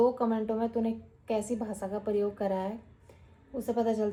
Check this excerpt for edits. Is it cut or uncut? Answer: uncut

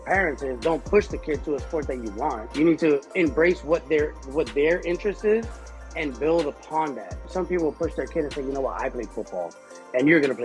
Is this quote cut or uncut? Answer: cut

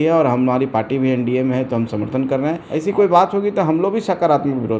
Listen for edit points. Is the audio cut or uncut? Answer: cut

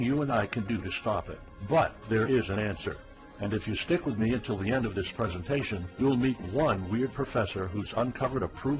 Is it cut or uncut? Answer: uncut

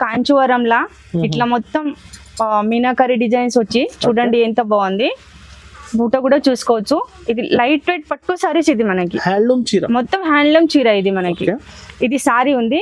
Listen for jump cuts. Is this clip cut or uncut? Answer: uncut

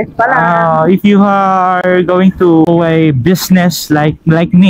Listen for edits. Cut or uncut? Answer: cut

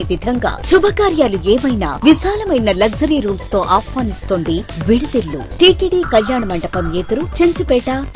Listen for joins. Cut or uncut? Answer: cut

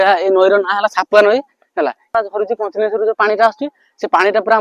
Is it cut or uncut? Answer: cut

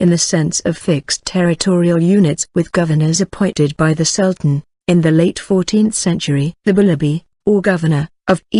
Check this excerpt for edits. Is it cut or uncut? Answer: cut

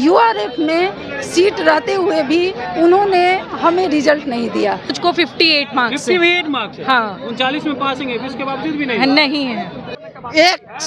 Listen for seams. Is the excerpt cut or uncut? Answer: cut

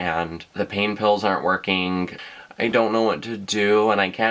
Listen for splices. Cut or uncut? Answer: cut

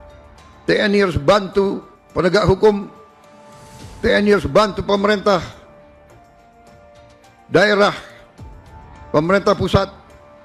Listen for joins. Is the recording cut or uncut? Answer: uncut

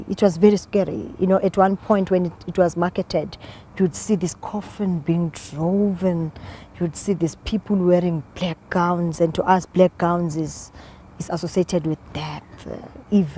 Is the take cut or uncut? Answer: cut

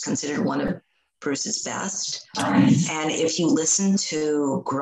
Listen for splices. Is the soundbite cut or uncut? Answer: cut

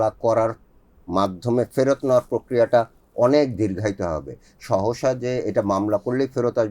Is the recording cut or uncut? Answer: uncut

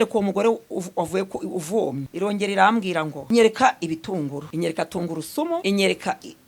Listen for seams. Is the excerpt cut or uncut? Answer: cut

